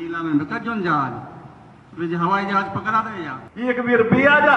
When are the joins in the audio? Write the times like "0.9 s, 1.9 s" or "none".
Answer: 3.4 s